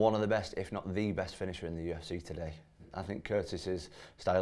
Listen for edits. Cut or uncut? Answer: cut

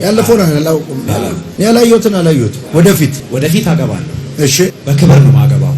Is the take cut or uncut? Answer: cut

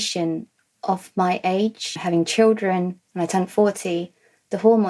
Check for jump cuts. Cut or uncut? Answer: cut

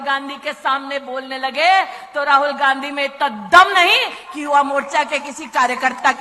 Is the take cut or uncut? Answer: uncut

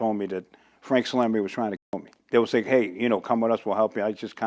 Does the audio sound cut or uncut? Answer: uncut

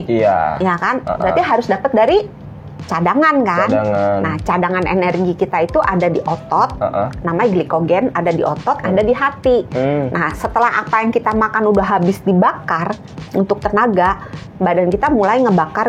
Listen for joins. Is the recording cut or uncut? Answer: uncut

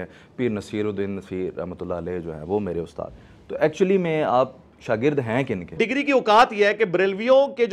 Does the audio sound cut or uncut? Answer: cut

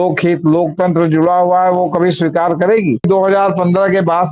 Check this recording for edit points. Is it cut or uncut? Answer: cut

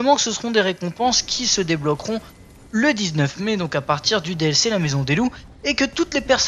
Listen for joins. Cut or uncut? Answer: uncut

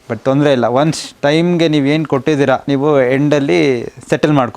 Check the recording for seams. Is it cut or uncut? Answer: cut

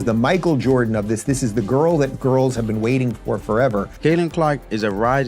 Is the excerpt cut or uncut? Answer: cut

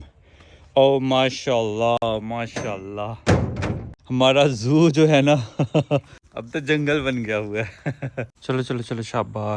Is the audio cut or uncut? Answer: cut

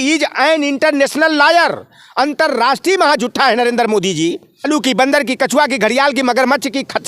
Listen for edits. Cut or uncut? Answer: cut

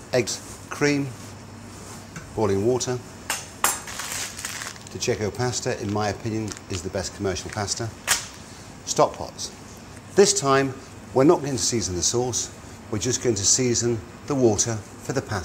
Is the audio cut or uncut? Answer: uncut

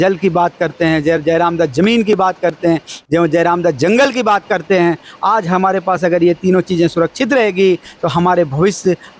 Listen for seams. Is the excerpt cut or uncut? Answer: uncut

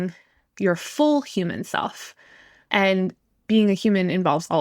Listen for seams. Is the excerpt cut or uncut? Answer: cut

